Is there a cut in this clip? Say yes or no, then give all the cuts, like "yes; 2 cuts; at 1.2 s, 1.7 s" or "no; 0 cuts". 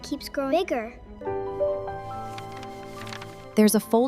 yes; 1 cut; at 1.1 s